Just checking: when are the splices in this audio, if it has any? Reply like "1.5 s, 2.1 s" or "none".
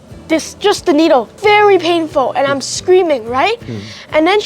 1.3 s